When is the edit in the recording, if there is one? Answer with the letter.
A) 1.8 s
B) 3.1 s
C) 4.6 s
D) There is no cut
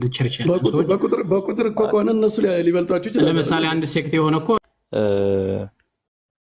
C